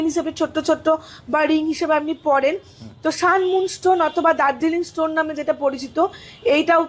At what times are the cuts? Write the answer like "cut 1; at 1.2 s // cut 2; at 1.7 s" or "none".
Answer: none